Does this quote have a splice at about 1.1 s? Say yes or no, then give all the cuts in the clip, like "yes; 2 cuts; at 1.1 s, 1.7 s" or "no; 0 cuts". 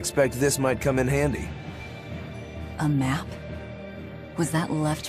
yes; 1 cut; at 1.1 s